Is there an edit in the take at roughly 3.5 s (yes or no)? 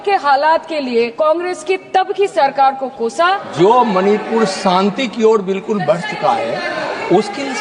yes